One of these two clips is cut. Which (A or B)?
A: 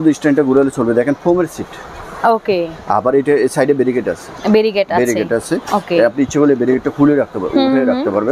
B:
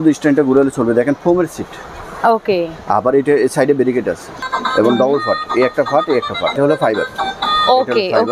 B